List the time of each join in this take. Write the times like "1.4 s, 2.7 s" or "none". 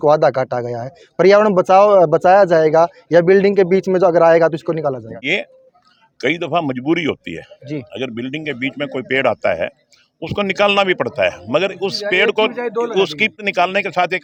none